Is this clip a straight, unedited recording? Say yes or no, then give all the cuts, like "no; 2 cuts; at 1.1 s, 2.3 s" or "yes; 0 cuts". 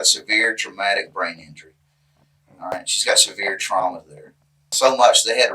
no; 1 cut; at 4.7 s